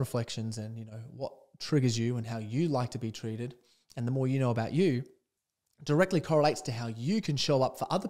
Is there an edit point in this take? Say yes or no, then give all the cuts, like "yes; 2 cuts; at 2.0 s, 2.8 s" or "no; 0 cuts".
no; 0 cuts